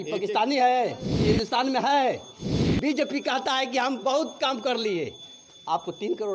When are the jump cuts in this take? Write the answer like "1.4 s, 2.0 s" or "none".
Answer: 1.1 s